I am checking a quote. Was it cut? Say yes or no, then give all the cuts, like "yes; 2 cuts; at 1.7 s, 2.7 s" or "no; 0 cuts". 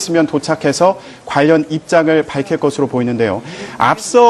yes; 1 cut; at 3.1 s